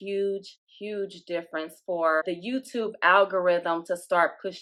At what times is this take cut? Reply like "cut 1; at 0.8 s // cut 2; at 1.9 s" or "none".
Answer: none